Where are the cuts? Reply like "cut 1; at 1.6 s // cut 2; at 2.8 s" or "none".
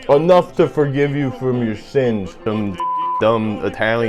cut 1; at 2.4 s